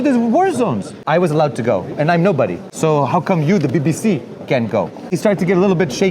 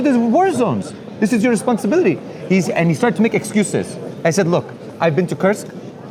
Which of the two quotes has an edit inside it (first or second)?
first